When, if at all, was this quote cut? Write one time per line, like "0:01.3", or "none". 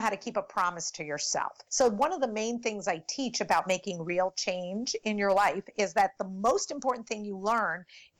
0:01.6